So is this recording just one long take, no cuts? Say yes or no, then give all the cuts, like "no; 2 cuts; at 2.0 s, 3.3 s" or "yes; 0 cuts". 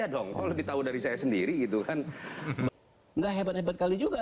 no; 1 cut; at 2.7 s